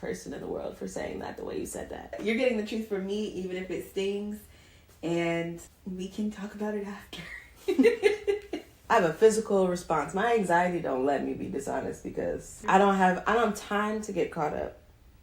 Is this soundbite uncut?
no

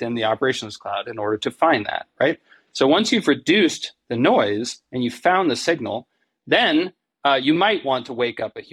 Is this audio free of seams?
yes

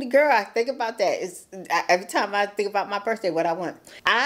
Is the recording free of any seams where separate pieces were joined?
yes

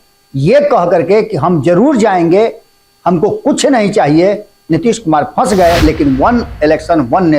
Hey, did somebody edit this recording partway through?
yes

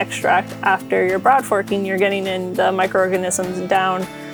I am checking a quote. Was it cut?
no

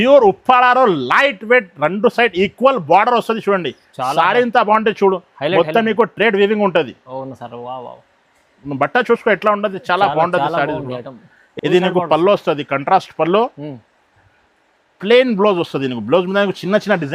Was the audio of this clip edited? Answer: no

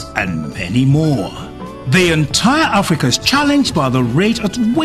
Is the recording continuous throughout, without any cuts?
no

